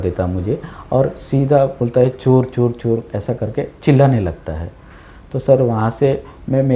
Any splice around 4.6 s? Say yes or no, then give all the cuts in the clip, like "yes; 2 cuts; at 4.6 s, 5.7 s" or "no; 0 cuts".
no; 0 cuts